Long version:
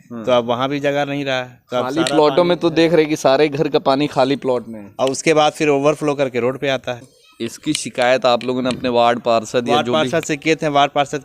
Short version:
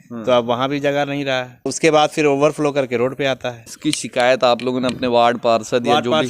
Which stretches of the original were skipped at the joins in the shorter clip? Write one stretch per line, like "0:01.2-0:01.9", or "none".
0:01.7-0:05.1
0:07.1-0:07.5